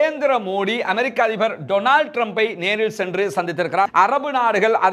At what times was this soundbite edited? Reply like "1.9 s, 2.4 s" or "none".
3.9 s